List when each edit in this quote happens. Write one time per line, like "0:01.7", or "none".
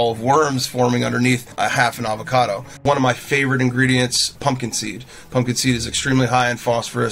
0:01.5
0:02.8
0:04.3